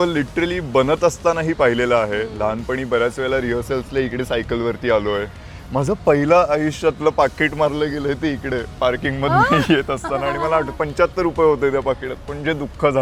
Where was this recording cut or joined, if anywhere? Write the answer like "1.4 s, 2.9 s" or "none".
none